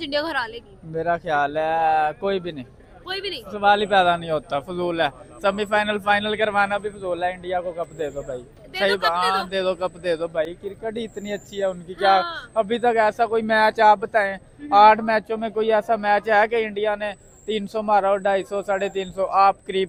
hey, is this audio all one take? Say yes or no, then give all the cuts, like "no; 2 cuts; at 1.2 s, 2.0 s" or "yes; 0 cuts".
yes; 0 cuts